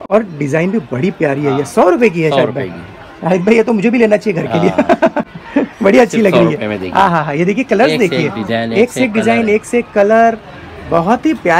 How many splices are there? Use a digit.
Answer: 0